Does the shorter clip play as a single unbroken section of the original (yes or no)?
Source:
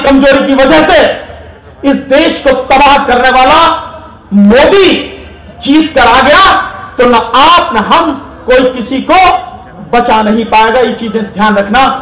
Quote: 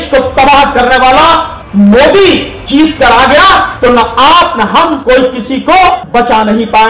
no